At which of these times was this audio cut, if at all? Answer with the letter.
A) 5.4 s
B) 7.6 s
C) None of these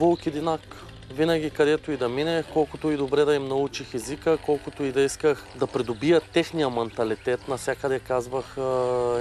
A